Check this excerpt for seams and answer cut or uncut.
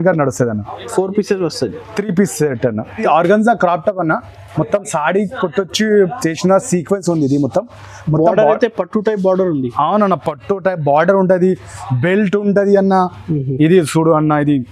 cut